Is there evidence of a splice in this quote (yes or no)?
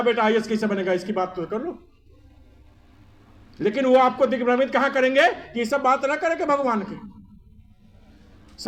no